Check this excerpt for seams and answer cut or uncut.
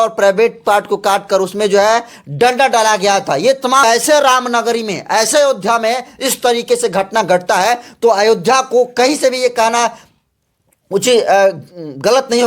cut